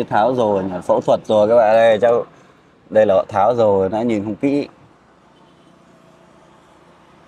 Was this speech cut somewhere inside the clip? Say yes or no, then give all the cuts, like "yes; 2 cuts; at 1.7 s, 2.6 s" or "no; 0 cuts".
no; 0 cuts